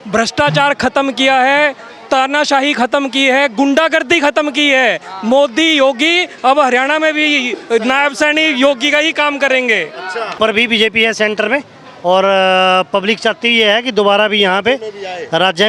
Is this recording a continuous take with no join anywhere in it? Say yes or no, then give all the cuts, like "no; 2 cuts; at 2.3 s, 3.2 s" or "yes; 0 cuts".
no; 1 cut; at 10.3 s